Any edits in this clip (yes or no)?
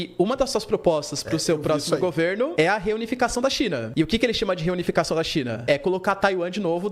no